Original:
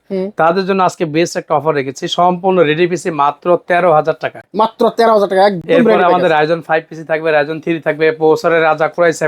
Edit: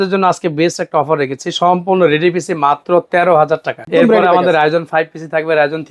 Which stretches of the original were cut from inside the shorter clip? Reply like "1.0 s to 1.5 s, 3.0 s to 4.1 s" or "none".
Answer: 4.4 s to 5.6 s